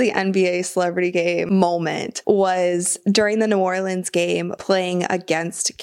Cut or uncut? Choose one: cut